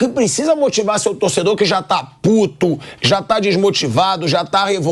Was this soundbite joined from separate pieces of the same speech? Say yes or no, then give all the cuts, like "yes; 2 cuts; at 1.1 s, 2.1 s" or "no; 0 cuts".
no; 0 cuts